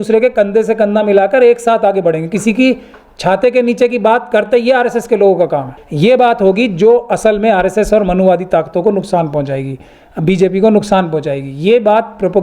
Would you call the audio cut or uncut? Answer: cut